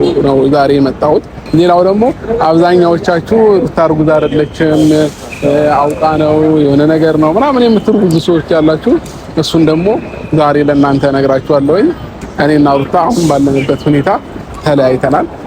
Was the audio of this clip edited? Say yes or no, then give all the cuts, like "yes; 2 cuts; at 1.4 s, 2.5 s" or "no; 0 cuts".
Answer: yes; 2 cuts; at 1.4 s, 12.1 s